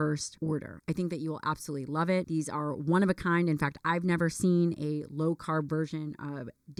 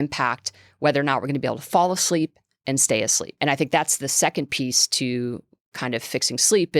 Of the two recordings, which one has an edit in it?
second; 1 cut; at 3.3 s

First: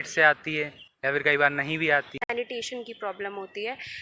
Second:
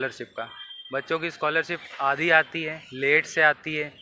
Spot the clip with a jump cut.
first; 1 cut; at 2.2 s

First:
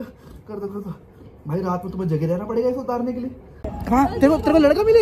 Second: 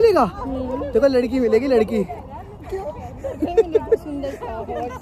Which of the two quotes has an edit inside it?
first; 1 cut; at 3.7 s

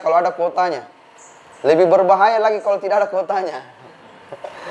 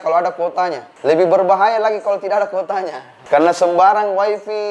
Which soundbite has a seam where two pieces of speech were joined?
second; 2 cuts; at 0.9 s, 3.1 s

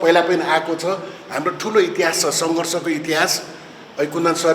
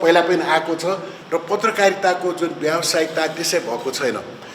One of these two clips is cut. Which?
second; 1 cut; at 1.1 s

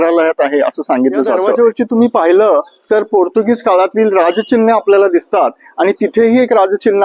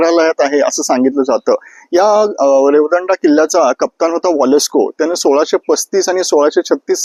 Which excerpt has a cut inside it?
first; 1 cut; at 1.5 s

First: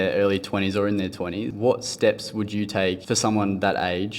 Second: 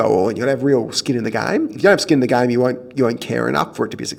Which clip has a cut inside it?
first; 2 cuts; at 1.5 s, 3.0 s

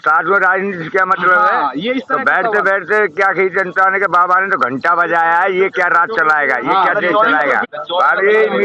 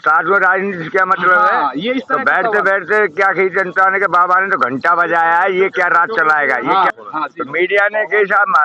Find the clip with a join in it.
second; 1 cut; at 6.9 s

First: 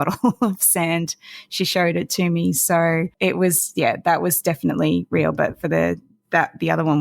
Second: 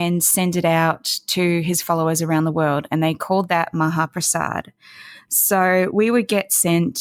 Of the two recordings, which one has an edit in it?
first; 1 cut; at 3.1 s

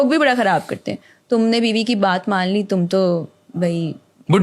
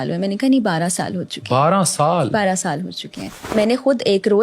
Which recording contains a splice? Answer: second; 1 cut; at 3.5 s

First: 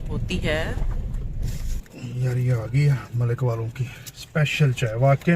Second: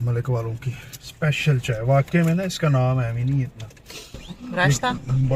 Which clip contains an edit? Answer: first; 1 cut; at 1.8 s

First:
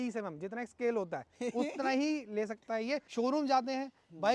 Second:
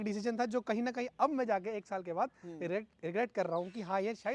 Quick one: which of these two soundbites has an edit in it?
first; 1 cut; at 3.1 s

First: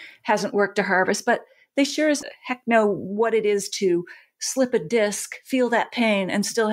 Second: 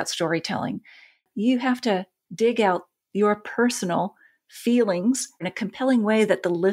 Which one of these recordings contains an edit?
second; 3 cuts; at 1.2 s, 2.2 s, 5.5 s

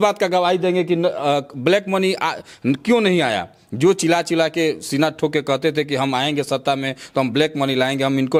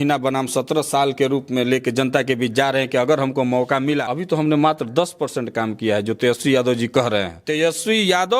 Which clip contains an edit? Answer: second; 2 cuts; at 4.1 s, 7.4 s

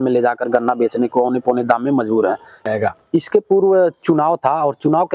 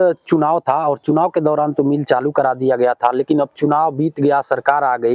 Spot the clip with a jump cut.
first; 1 cut; at 2.7 s

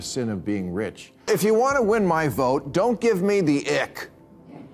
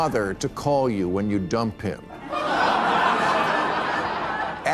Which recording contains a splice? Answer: first; 1 cut; at 1.2 s

